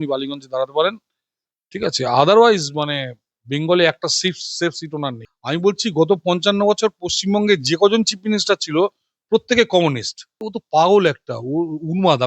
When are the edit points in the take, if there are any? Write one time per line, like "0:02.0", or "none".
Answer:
0:05.2
0:10.6